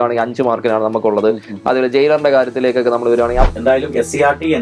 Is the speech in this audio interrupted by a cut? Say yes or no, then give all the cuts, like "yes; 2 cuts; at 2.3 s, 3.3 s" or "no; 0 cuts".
yes; 1 cut; at 3.5 s